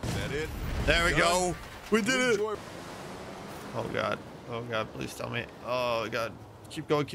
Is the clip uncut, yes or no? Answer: no